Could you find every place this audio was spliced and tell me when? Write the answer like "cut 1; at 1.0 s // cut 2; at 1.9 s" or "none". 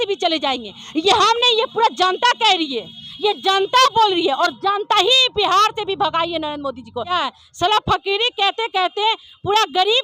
cut 1; at 7.1 s